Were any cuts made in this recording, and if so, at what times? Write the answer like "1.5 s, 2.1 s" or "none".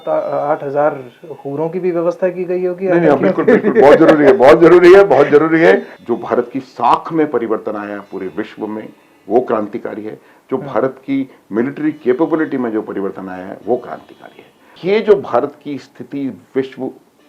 5.9 s, 14.7 s